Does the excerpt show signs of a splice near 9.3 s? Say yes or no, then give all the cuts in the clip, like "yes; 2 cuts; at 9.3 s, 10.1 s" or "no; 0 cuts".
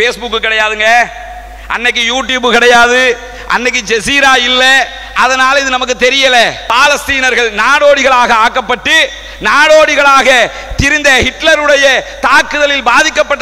no; 1 cut; at 6.6 s